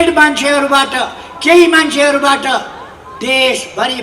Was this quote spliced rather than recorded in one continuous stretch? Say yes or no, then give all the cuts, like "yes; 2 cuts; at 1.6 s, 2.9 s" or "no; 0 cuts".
no; 0 cuts